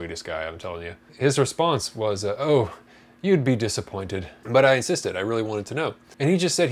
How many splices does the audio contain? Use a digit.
1